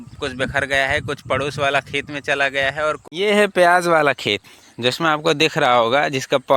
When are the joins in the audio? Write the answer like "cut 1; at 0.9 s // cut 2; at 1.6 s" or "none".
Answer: cut 1; at 3.0 s